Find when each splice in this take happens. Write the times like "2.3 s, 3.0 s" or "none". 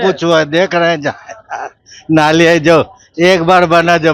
none